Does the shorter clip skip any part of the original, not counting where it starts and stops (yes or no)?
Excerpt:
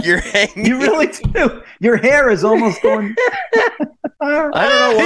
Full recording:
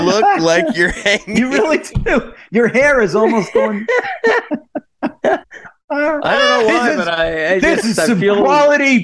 yes